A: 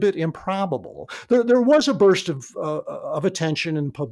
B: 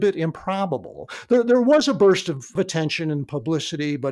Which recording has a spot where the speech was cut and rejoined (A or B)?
B